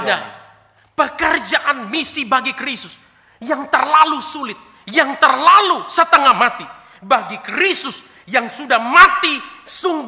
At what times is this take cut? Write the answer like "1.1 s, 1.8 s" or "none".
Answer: none